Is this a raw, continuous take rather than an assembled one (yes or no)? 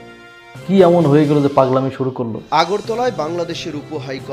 no